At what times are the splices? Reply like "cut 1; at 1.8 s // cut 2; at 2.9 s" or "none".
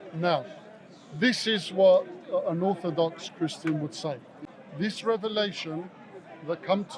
cut 1; at 4.3 s